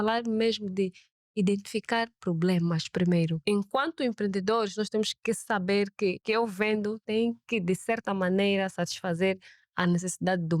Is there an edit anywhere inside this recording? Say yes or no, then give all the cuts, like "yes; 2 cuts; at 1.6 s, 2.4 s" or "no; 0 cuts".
yes; 3 cuts; at 3.4 s, 6.2 s, 7.0 s